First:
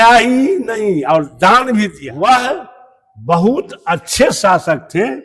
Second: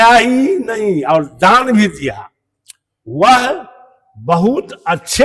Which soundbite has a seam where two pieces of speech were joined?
first; 1 cut; at 2.0 s

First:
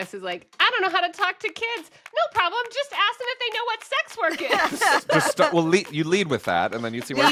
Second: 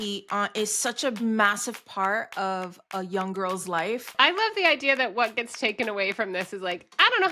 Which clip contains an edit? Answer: second; 2 cuts; at 1.2 s, 4.1 s

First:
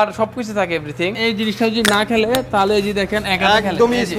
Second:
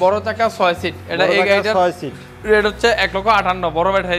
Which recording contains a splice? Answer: first; 1 cut; at 1.2 s

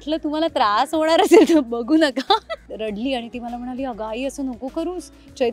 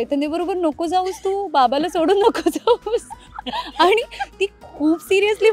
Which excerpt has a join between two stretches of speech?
first; 1 cut; at 2.6 s

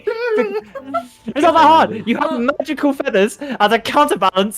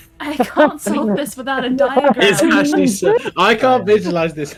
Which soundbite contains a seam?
first; 1 cut; at 1.2 s

